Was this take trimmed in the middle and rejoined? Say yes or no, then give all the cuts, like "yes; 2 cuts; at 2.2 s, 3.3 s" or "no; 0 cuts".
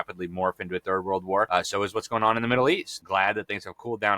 yes; 2 cuts; at 1.5 s, 2.9 s